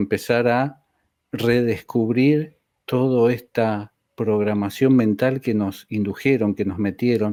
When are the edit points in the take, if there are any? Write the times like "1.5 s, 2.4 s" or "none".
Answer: none